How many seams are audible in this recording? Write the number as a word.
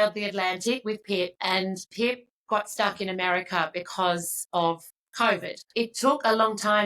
two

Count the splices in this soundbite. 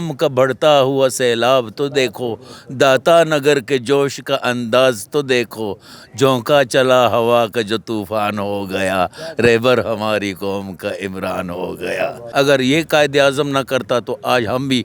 one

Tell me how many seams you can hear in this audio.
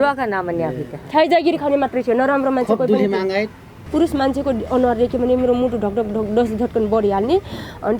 one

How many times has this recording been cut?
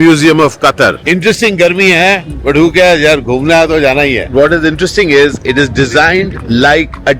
zero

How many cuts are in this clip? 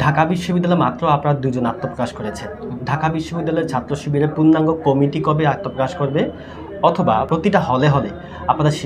zero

